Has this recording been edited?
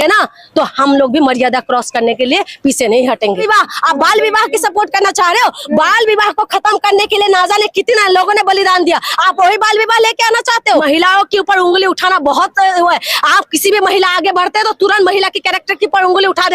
yes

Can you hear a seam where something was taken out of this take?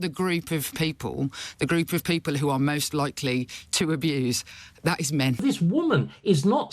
yes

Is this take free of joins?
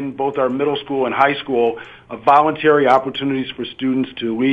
yes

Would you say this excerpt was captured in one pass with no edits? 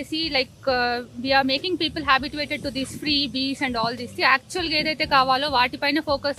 yes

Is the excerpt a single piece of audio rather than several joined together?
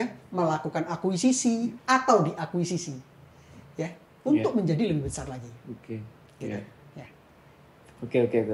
yes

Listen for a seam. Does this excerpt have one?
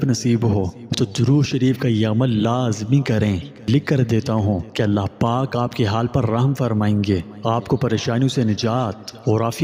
no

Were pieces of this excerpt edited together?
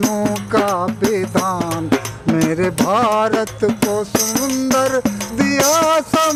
no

